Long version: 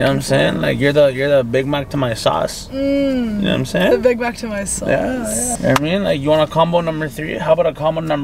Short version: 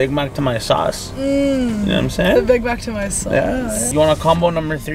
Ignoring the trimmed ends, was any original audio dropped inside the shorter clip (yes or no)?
yes